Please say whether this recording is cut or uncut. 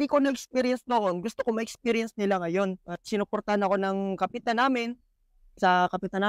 uncut